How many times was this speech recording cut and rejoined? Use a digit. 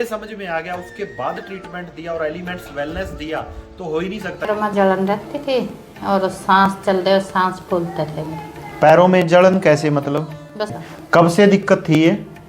2